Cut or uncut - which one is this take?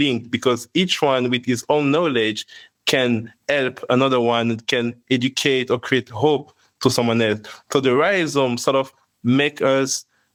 uncut